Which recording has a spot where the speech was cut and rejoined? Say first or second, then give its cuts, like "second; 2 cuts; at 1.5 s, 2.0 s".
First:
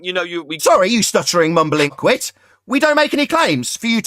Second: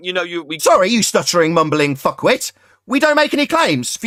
first; 1 cut; at 2.0 s